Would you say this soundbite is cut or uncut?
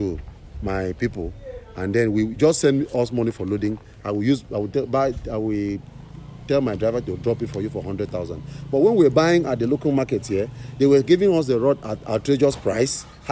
uncut